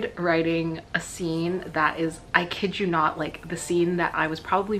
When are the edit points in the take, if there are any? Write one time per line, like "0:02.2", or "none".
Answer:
none